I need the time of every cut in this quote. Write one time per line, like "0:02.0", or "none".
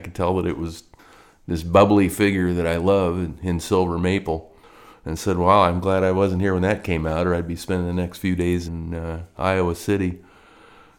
0:08.7